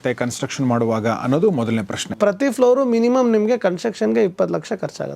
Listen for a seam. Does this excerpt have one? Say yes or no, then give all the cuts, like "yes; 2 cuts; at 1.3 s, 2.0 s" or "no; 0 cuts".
yes; 1 cut; at 2.1 s